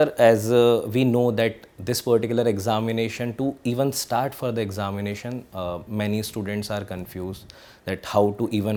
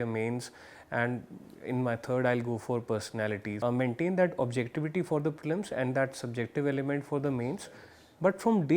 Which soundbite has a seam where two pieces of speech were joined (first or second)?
second